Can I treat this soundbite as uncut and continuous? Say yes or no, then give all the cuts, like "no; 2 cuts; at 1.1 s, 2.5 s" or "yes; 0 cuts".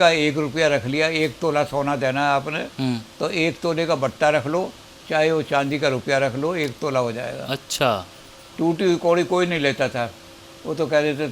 no; 1 cut; at 8.5 s